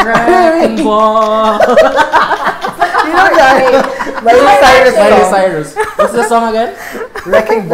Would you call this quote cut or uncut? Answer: uncut